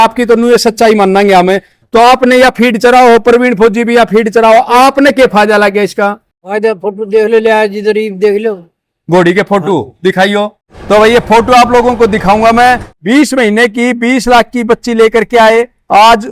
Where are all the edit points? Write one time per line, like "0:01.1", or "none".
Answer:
none